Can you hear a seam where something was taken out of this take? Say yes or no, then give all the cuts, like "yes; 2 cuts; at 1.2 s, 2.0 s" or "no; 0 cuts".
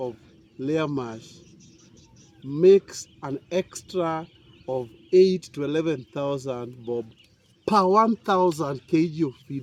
no; 0 cuts